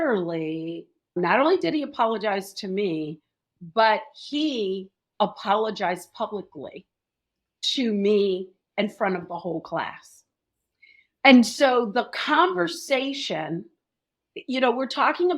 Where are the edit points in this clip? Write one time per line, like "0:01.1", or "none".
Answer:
0:01.2